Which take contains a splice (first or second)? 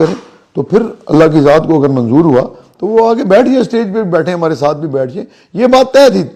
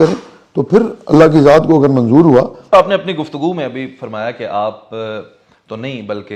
second